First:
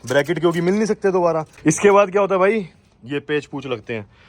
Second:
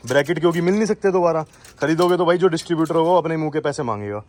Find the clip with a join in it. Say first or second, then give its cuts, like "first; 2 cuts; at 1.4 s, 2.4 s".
first; 1 cut; at 1.5 s